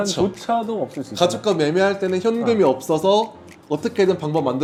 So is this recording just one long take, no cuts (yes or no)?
yes